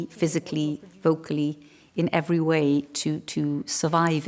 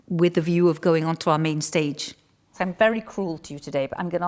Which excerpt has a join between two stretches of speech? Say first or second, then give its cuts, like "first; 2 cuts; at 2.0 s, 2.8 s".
second; 1 cut; at 2.5 s